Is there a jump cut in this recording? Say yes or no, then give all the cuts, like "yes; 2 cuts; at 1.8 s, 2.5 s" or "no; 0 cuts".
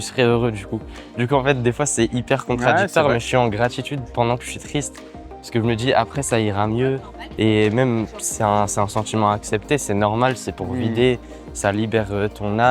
no; 0 cuts